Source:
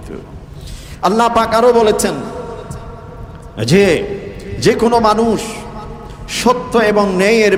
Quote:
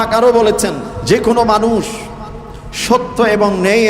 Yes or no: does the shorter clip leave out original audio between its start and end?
yes